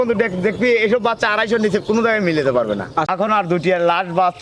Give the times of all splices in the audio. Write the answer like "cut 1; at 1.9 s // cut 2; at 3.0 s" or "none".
cut 1; at 3.1 s